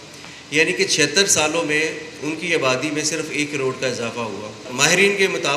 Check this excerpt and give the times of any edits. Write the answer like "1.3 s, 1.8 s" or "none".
4.7 s